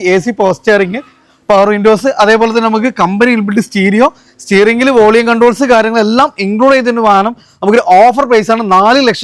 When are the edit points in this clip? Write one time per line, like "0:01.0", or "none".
none